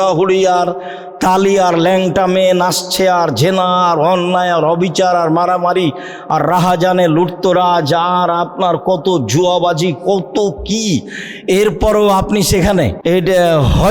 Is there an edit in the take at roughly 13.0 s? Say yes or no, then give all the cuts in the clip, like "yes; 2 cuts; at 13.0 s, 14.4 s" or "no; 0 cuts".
yes; 1 cut; at 13.0 s